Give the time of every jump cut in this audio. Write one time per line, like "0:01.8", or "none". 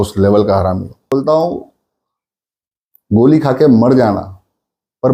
0:01.1